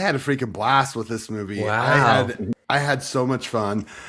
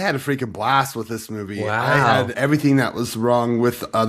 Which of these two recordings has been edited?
second; 1 cut; at 2.4 s

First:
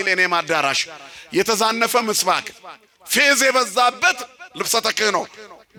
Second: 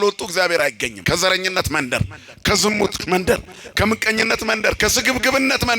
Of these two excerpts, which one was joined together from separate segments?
second; 1 cut; at 0.9 s

